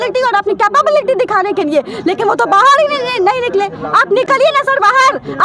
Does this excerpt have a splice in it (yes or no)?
no